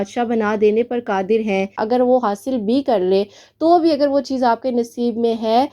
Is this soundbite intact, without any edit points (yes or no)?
no